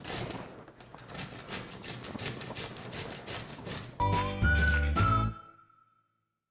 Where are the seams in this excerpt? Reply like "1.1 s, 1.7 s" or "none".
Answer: none

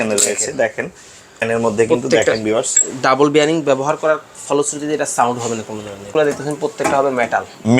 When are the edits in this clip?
1.4 s, 6.1 s

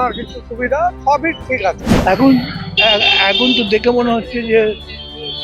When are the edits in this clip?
1.9 s

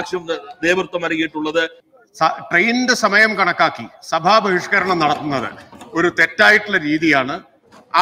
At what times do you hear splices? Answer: 1.8 s

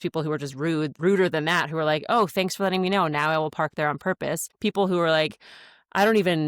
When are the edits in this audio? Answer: 0.9 s, 4.5 s

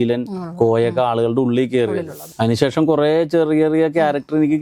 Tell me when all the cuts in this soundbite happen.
2.2 s

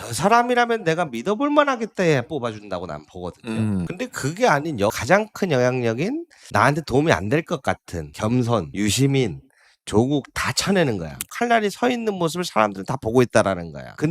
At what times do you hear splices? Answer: 11.3 s

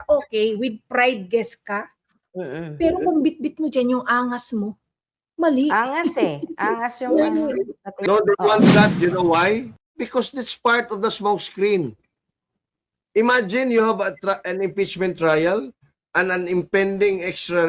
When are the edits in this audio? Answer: 7.9 s

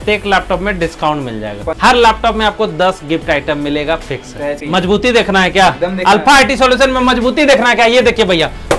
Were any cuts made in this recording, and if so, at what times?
1.6 s, 4.6 s

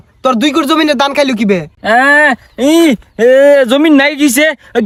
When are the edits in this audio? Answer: none

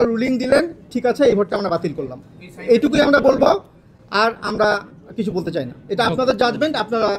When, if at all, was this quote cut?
none

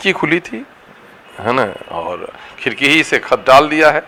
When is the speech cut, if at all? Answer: none

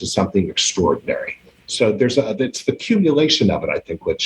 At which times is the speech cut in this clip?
none

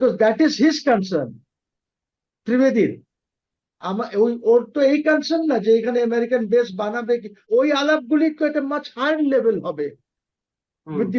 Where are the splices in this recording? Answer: 7.5 s

